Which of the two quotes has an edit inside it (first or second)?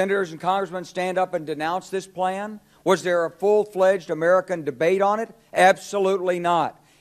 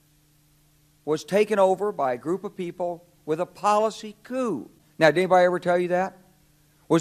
second